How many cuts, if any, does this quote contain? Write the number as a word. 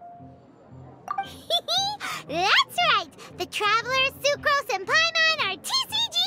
one